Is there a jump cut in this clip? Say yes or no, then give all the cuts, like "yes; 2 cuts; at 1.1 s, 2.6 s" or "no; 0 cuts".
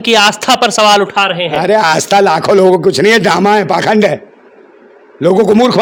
no; 0 cuts